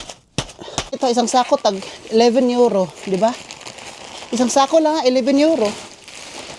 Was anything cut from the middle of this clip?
yes; 1 cut; at 1.0 s

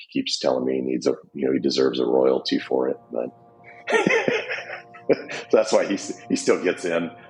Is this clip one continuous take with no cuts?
yes; 0 cuts

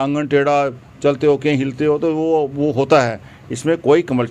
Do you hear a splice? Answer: no; 0 cuts

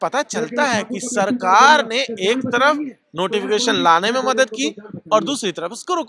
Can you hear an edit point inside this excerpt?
no; 0 cuts

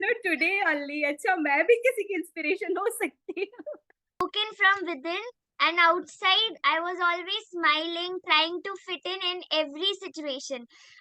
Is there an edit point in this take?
yes; 1 cut; at 4.2 s

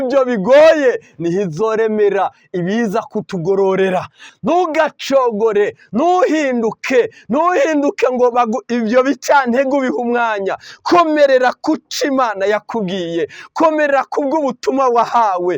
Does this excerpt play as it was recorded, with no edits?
no; 1 cut; at 4.3 s

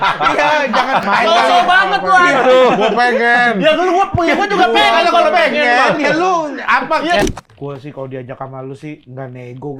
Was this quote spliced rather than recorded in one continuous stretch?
yes; 1 cut; at 7.2 s

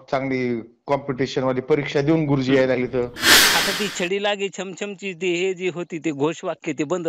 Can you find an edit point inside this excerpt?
yes; 1 cut; at 3.4 s

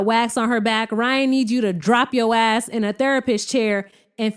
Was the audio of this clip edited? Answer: no; 0 cuts

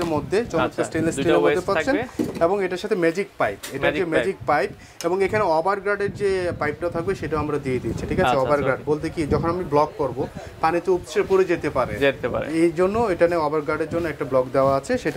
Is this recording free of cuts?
yes; 0 cuts

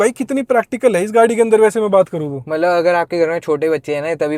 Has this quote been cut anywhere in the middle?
no; 0 cuts

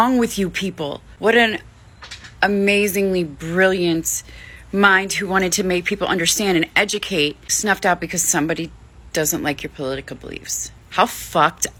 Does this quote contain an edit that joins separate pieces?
no; 0 cuts

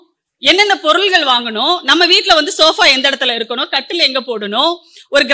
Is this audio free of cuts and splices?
yes; 0 cuts

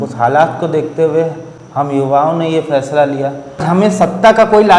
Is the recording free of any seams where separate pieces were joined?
no; 1 cut; at 3.6 s

